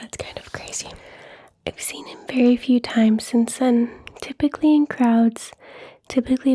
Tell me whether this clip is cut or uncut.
cut